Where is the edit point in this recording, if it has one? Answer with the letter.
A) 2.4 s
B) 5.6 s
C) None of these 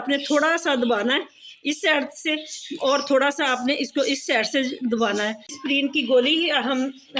B